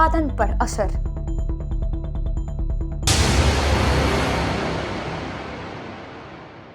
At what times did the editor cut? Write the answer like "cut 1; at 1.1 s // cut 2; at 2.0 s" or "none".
cut 1; at 2.9 s